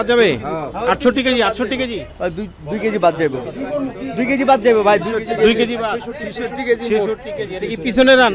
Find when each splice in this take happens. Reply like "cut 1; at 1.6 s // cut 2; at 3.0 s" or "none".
none